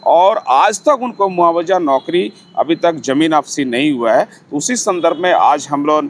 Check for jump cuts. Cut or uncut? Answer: uncut